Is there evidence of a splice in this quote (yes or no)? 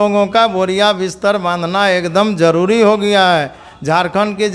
no